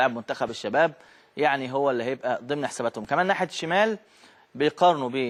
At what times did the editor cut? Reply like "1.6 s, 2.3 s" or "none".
none